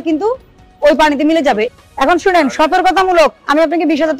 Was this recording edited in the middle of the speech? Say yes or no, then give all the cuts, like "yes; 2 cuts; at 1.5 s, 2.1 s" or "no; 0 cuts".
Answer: yes; 1 cut; at 1.7 s